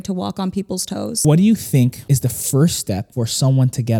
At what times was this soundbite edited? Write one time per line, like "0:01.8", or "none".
0:01.1
0:02.0
0:03.1